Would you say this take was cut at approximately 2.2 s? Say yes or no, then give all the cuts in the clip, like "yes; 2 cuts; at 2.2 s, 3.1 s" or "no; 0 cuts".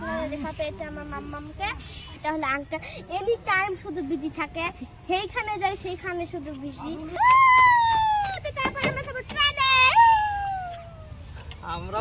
yes; 2 cuts; at 2.2 s, 7.1 s